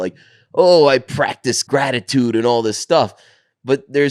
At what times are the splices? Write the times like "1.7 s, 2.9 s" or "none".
1.6 s